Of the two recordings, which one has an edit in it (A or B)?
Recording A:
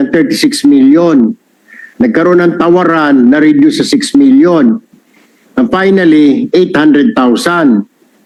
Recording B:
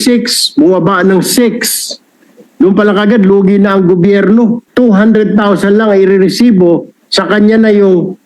B